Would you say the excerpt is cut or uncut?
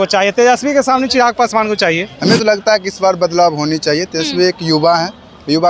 cut